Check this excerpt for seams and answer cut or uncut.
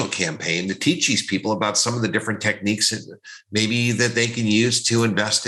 uncut